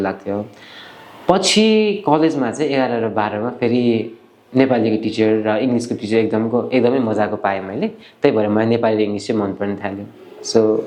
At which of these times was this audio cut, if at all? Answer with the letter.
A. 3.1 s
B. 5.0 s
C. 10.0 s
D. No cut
D